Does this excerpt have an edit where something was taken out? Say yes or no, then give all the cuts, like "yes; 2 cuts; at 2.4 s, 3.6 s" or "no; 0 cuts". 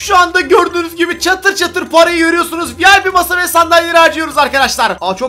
no; 0 cuts